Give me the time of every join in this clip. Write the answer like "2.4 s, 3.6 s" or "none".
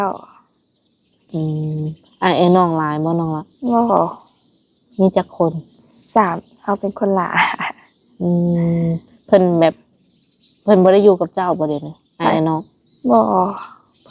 none